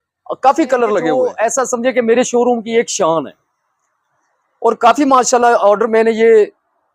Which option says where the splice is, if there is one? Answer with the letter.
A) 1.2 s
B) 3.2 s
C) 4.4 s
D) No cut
A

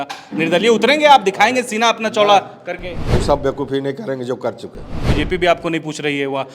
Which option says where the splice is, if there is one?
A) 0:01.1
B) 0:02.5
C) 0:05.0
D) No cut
C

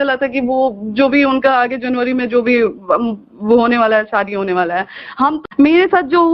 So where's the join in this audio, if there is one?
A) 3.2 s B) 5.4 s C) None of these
B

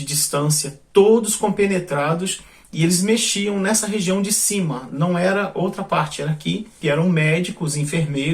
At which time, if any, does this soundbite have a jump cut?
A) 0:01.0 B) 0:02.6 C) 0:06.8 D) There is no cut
C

